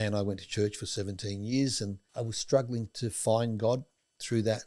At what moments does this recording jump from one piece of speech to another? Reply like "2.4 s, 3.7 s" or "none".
2.0 s